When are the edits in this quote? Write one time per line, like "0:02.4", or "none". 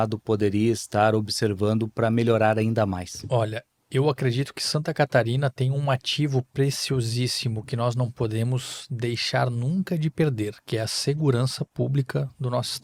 none